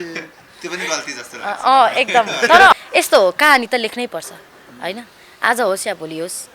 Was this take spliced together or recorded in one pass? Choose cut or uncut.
cut